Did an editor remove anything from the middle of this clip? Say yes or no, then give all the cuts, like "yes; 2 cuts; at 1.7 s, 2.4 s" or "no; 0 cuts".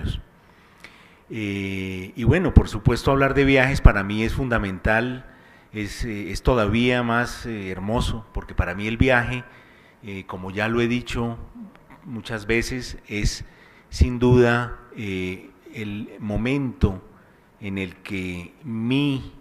yes; 1 cut; at 4.9 s